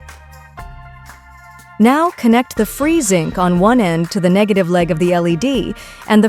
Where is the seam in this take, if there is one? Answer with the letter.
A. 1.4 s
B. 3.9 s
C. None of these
A